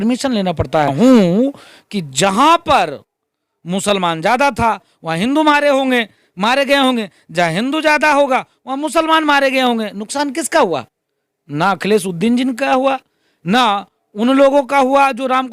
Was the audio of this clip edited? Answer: yes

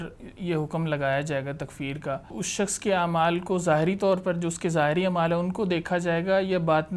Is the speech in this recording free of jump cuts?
no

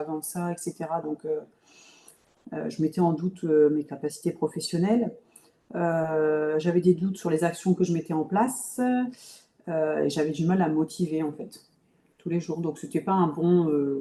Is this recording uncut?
yes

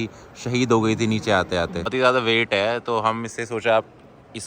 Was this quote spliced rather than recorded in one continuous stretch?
yes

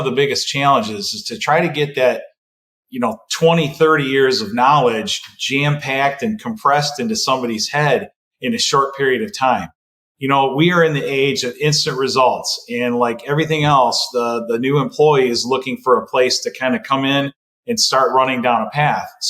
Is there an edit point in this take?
no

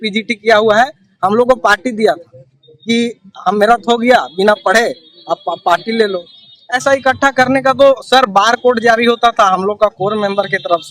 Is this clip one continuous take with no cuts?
no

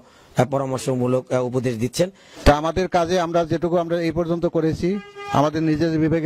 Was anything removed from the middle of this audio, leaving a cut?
yes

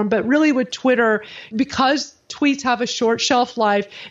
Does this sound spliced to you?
yes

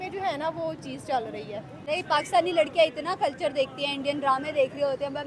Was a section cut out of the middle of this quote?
yes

